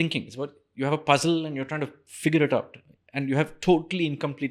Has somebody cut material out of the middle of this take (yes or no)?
no